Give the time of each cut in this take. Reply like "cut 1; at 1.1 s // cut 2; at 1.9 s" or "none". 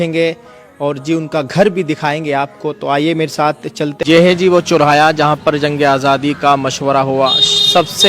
cut 1; at 4.0 s